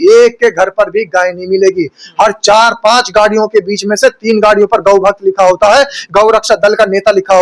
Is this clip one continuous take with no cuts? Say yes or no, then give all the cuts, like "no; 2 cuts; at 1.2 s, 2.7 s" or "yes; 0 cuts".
yes; 0 cuts